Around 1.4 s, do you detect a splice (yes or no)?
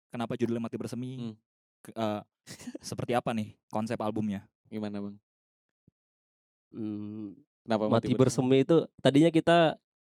no